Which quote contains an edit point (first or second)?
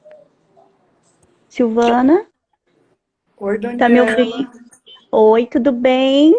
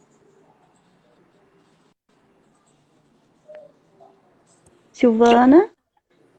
first